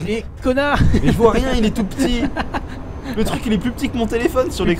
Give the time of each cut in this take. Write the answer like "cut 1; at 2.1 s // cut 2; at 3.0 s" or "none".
none